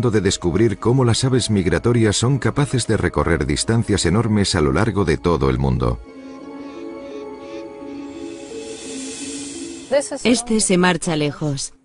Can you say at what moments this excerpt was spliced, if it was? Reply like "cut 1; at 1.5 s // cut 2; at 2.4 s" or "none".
cut 1; at 6.5 s